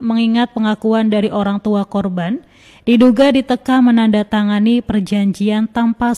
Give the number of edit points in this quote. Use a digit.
0